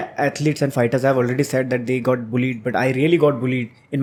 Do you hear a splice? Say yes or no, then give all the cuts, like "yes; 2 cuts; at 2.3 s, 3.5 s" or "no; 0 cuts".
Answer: no; 0 cuts